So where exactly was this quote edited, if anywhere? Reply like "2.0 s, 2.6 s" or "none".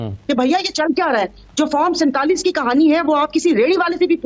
none